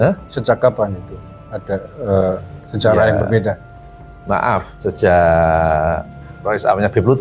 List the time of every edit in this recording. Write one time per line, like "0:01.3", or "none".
0:04.7